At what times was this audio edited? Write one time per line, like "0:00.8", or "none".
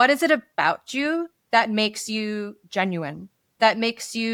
none